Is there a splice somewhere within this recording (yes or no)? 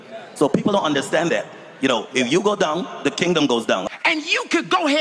yes